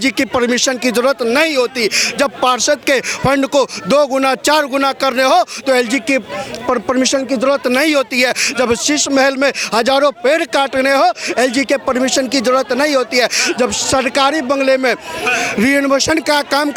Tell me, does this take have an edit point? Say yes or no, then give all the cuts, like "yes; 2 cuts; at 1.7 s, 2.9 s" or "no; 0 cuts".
no; 0 cuts